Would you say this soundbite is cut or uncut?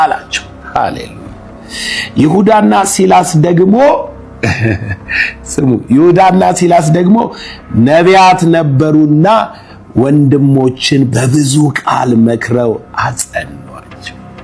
uncut